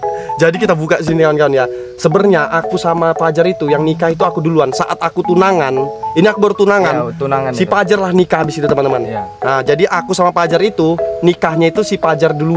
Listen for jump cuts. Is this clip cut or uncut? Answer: uncut